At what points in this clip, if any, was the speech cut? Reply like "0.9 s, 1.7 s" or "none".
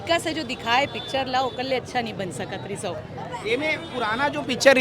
none